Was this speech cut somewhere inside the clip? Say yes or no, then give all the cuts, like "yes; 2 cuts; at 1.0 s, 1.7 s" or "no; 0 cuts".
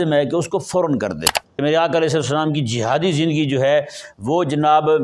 yes; 1 cut; at 1.4 s